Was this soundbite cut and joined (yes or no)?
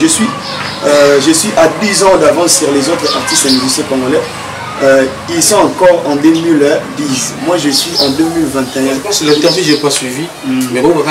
yes